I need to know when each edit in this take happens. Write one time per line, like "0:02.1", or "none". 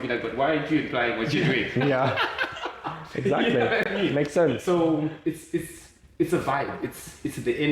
none